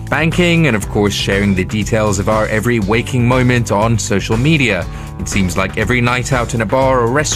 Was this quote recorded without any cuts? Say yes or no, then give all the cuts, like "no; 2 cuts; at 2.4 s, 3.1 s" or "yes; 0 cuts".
yes; 0 cuts